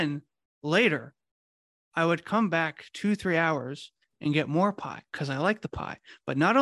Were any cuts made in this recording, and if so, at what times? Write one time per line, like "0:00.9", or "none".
none